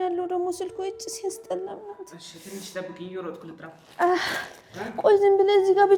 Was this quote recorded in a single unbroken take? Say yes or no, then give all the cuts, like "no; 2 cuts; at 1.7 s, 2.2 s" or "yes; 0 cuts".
yes; 0 cuts